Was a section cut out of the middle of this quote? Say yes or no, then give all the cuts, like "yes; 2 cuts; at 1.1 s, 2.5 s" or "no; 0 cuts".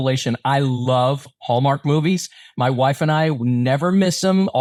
no; 0 cuts